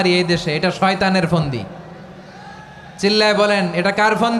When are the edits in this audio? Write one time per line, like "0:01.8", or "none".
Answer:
none